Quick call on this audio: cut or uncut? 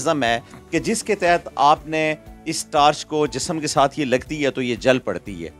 uncut